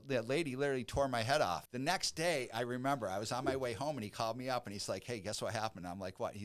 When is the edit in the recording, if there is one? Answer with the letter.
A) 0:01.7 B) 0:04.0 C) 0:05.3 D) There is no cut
A